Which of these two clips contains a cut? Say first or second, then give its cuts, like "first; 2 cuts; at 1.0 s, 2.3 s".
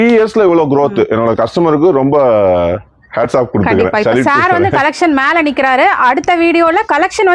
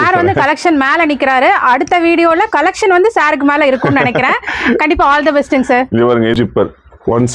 second; 1 cut; at 6.3 s